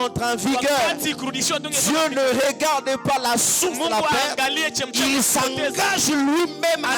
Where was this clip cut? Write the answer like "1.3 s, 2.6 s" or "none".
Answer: none